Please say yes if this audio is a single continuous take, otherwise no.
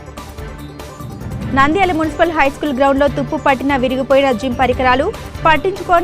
no